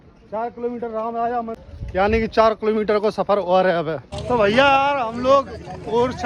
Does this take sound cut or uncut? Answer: cut